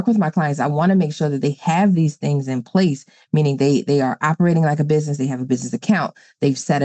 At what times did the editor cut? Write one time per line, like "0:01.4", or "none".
none